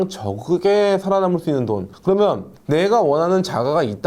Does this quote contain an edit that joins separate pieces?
no; 0 cuts

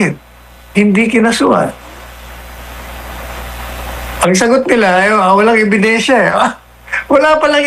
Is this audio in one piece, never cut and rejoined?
yes; 0 cuts

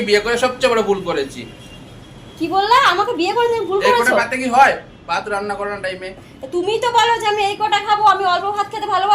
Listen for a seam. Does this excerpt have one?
no; 0 cuts

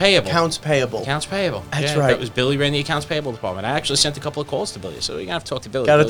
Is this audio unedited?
yes; 0 cuts

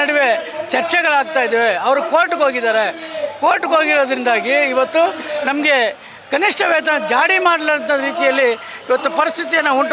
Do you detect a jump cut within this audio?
no; 0 cuts

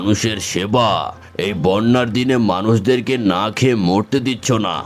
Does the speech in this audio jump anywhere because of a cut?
no; 0 cuts

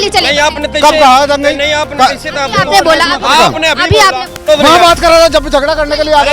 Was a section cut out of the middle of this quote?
yes; 1 cut; at 4.4 s

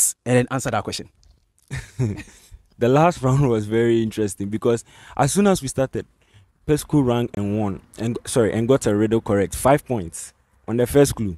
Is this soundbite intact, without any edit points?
yes; 0 cuts

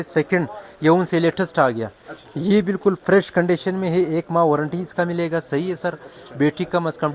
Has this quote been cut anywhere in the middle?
no; 0 cuts

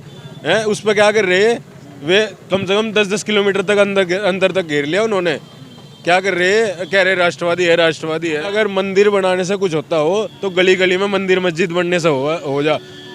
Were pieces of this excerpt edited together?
yes; 1 cut; at 8.5 s

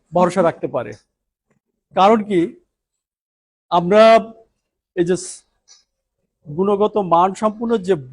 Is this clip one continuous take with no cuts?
yes; 0 cuts

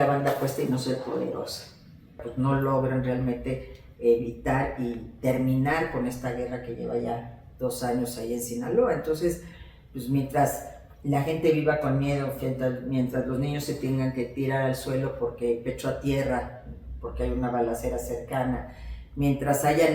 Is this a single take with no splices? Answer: no; 1 cut; at 2.2 s

